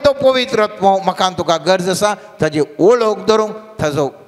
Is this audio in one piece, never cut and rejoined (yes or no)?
yes